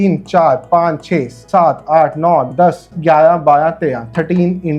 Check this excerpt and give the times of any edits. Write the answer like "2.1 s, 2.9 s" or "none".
none